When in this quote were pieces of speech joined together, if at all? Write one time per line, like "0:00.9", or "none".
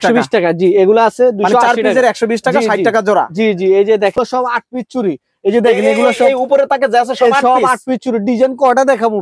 0:04.1